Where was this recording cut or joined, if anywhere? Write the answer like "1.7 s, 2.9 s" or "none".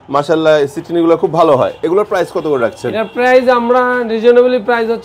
none